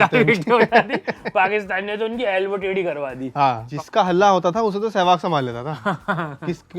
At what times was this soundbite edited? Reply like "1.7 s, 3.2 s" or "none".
3.7 s